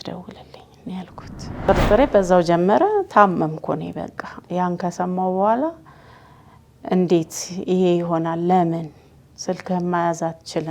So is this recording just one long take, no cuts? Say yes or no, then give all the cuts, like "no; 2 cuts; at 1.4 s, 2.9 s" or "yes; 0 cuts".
no; 1 cut; at 1.6 s